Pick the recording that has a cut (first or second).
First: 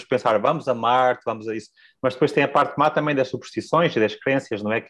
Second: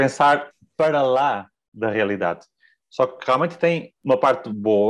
second